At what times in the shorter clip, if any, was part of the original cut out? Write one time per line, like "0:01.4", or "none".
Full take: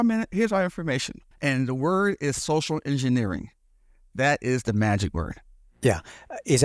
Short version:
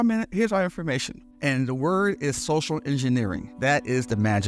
0:03.5